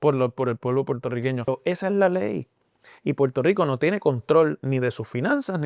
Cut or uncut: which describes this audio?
cut